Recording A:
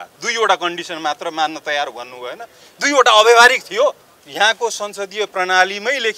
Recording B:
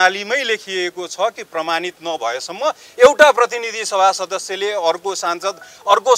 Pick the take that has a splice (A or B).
A